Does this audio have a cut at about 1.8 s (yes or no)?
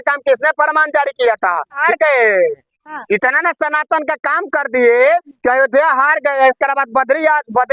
yes